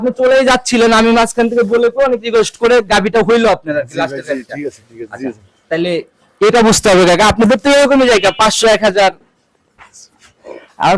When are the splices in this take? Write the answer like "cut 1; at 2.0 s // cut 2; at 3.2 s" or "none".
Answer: none